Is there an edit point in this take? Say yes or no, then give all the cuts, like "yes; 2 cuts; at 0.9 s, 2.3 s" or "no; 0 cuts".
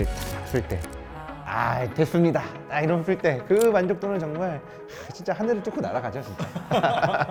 no; 0 cuts